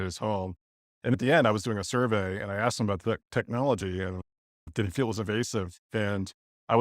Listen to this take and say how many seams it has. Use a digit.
1